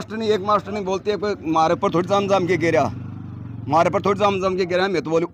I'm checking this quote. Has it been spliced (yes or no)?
no